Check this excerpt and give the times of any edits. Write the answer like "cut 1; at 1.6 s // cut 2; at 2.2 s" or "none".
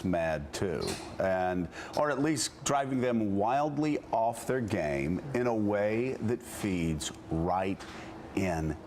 cut 1; at 2.7 s